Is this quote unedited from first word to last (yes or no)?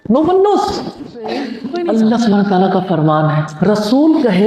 no